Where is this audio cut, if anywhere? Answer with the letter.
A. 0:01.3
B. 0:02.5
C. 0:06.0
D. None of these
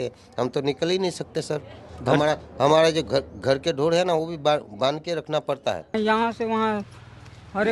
C